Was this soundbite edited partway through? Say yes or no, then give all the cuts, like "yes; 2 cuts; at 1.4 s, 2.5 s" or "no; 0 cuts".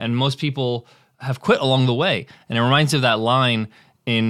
no; 0 cuts